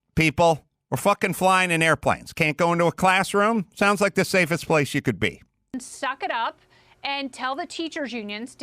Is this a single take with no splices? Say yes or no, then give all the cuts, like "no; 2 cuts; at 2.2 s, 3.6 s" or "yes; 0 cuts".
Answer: yes; 0 cuts